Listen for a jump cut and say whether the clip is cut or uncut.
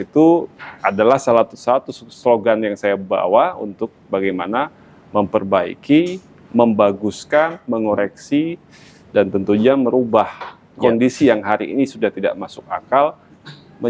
uncut